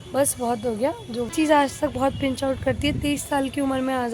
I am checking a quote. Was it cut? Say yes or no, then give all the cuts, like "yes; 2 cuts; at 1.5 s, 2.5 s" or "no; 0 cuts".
yes; 1 cut; at 1.3 s